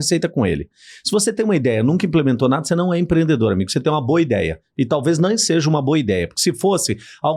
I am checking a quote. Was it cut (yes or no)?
no